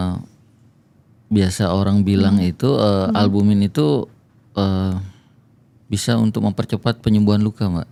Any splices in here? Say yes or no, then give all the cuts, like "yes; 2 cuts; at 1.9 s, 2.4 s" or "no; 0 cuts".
no; 0 cuts